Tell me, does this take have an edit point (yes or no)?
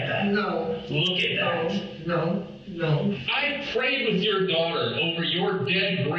yes